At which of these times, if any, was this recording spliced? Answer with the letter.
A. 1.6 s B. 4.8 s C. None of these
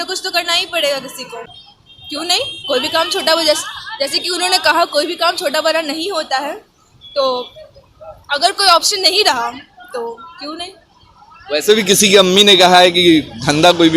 A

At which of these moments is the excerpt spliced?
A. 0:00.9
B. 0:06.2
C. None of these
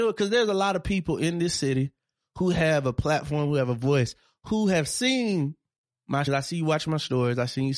B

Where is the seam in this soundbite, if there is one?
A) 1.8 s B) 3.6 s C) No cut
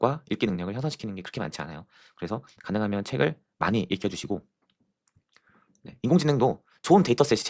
C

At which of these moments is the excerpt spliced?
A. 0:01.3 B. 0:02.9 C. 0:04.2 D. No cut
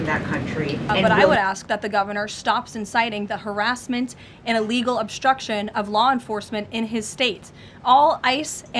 A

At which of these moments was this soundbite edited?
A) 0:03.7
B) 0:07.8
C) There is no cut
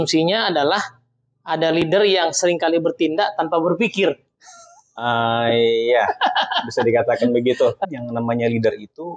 B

